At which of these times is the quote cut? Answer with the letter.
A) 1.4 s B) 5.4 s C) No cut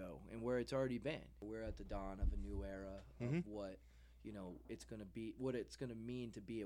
A